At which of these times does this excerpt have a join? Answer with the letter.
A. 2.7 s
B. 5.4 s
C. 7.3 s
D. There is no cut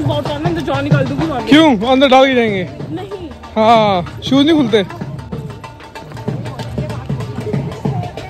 D